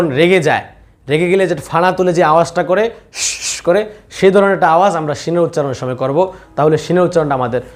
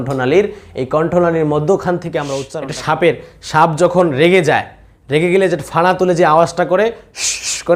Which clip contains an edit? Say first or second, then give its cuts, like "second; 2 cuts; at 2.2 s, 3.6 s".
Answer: second; 1 cut; at 2.4 s